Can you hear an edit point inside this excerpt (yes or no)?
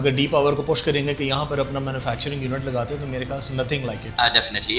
no